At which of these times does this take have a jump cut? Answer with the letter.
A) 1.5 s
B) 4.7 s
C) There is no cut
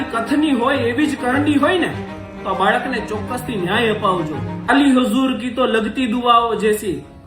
B